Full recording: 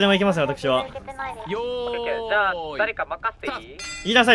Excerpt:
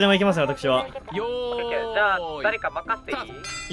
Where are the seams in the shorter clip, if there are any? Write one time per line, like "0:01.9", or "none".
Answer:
0:01.0